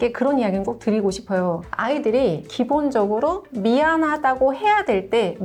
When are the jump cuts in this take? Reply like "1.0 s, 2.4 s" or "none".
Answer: none